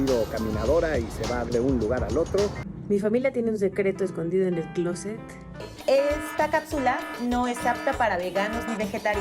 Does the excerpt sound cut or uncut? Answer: cut